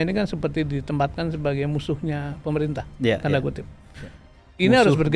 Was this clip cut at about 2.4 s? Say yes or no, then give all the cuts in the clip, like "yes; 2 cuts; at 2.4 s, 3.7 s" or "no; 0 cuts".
no; 0 cuts